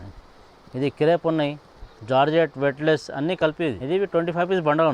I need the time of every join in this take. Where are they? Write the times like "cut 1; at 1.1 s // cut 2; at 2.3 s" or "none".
cut 1; at 3.8 s